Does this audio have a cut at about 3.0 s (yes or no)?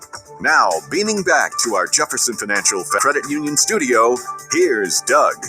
yes